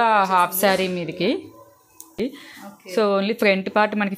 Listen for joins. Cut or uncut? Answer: cut